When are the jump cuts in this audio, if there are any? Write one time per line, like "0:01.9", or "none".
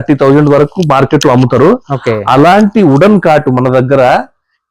none

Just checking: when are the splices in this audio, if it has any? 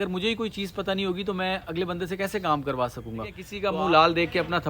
0:03.5

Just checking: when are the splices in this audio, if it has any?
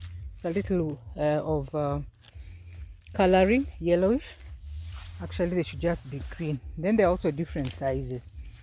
none

